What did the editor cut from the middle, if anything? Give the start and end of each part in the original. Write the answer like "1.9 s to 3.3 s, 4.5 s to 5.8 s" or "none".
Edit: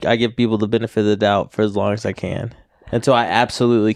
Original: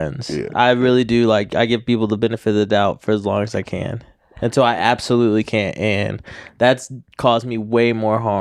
none